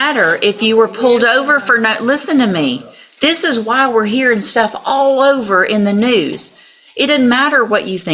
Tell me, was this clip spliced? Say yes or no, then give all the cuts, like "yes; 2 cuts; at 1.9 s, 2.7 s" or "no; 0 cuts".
no; 0 cuts